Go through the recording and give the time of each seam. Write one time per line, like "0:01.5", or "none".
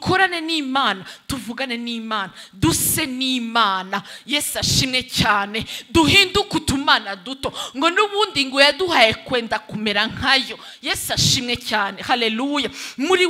none